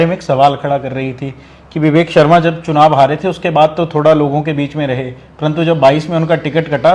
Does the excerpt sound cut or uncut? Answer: uncut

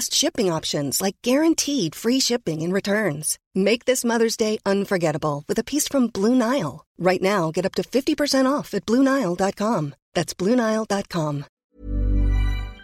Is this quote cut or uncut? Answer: cut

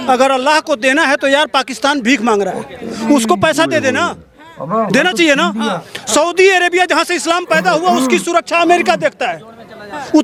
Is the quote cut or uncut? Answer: uncut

